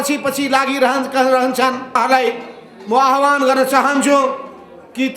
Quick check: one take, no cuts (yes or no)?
no